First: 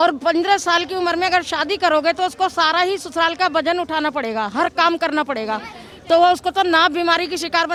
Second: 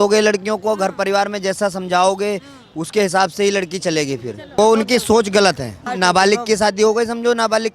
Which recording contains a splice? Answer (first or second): second